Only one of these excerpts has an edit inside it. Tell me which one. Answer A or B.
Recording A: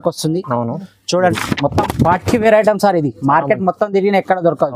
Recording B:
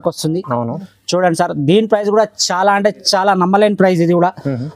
A